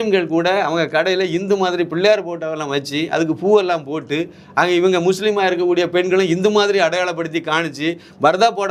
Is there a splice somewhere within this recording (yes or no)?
no